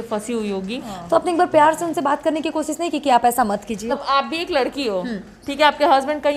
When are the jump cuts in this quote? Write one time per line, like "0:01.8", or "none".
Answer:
0:00.9
0:04.0